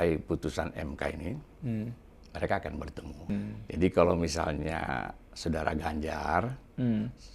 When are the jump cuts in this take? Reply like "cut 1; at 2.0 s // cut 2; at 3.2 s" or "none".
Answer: cut 1; at 3.3 s